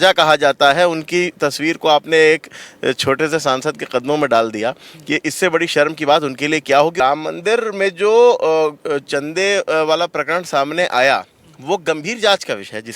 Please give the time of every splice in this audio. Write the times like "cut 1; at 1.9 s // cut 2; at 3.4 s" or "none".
cut 1; at 7.0 s

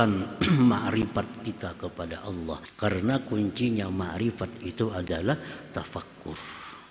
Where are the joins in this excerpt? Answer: cut 1; at 2.7 s

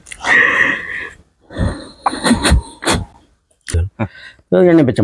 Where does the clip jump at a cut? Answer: cut 1; at 3.8 s

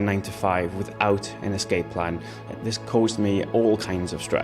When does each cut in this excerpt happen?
cut 1; at 3.5 s

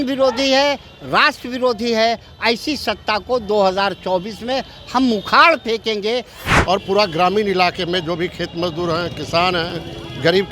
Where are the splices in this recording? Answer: cut 1; at 6.4 s

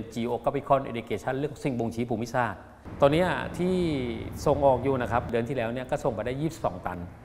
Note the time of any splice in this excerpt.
cut 1; at 2.8 s // cut 2; at 5.3 s

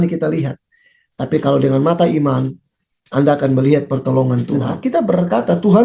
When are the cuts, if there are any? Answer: cut 1; at 4.8 s

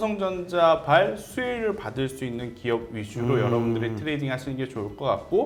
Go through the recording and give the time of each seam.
none

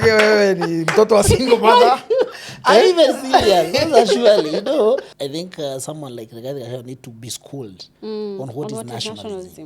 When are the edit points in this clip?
cut 1; at 5.1 s

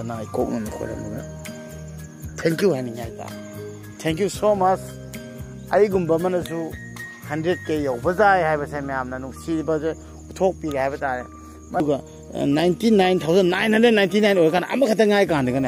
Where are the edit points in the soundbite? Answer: cut 1; at 11.8 s

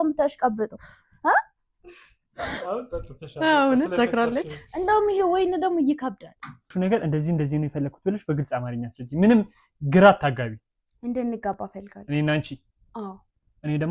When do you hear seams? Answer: cut 1; at 6.6 s

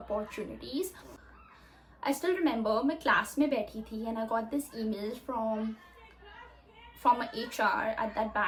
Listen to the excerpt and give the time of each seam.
none

